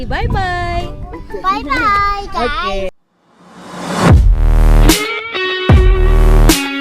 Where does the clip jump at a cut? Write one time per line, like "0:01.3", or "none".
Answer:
0:02.9